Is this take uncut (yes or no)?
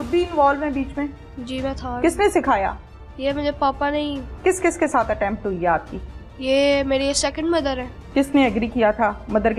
no